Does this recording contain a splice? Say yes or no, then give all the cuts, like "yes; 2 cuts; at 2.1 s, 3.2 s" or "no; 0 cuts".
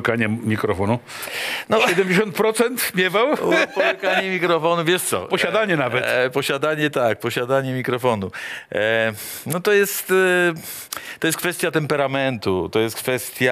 no; 0 cuts